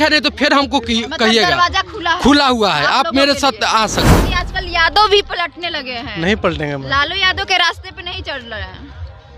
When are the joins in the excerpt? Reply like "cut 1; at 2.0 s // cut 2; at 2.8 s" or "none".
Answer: cut 1; at 4.2 s